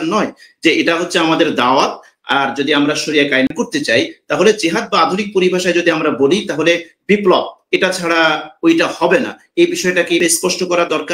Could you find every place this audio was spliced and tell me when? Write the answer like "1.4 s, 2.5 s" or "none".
3.5 s, 10.2 s